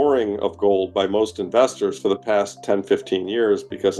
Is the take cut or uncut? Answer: uncut